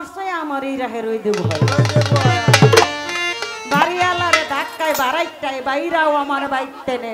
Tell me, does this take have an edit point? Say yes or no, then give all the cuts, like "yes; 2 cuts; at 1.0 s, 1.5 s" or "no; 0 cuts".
no; 0 cuts